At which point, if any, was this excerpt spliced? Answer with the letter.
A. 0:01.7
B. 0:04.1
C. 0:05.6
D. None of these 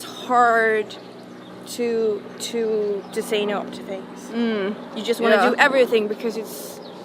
D